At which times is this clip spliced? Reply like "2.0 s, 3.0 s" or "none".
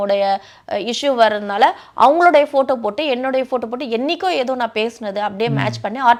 none